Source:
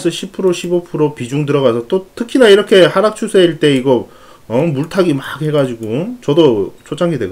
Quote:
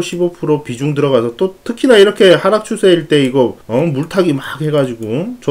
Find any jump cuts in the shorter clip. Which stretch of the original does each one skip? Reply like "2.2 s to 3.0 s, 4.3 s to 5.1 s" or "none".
4.1 s to 4.4 s